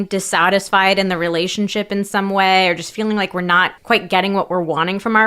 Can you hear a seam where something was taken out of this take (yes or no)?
yes